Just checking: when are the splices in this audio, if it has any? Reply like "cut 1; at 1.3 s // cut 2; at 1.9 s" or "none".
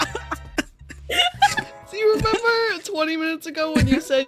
none